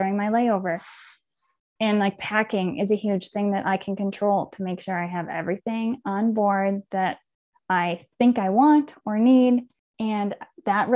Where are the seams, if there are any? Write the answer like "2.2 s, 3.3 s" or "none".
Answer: 9.8 s